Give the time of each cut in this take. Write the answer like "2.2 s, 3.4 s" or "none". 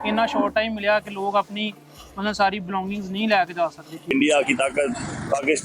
4.1 s